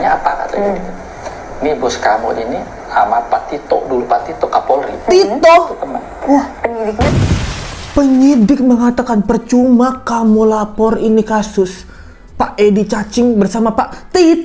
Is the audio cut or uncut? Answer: uncut